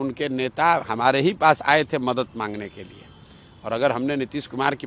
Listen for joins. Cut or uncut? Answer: uncut